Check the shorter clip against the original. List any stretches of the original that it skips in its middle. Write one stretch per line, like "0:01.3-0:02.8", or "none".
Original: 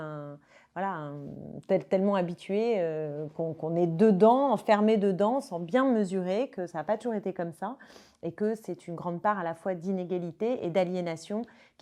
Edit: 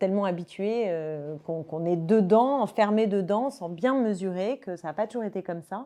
none